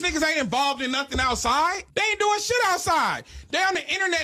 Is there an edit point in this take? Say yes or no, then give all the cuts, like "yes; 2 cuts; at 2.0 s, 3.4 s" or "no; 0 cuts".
no; 0 cuts